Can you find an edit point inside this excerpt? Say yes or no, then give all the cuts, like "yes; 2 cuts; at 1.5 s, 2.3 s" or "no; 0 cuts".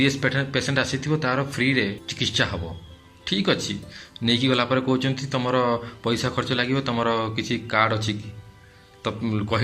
yes; 1 cut; at 2.1 s